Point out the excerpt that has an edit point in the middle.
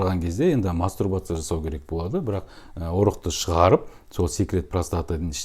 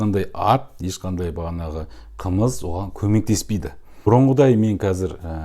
second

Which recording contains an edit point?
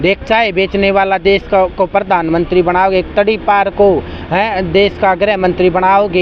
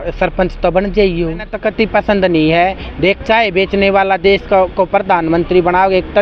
second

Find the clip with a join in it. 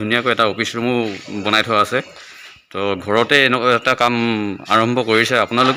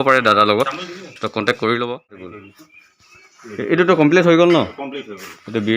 second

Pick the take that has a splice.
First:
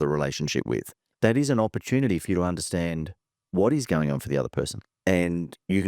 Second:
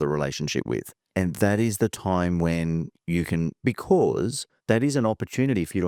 first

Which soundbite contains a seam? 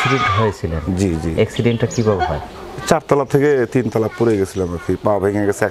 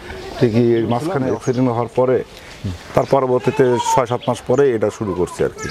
second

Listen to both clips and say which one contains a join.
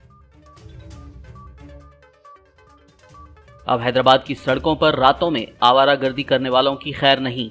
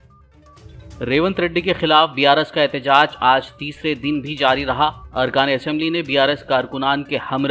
second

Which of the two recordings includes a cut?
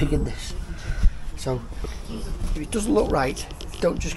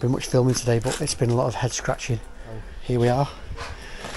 second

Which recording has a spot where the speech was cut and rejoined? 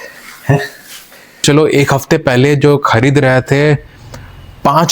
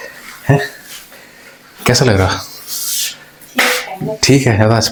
first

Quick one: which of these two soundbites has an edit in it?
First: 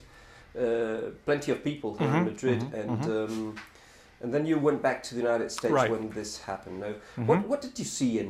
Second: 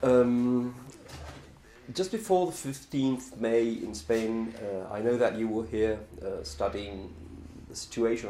second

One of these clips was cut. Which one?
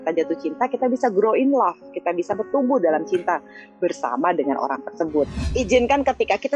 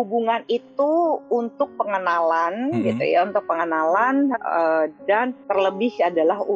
first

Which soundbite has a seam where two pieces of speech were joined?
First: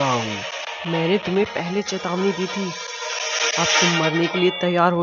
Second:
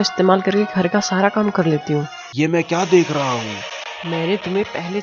second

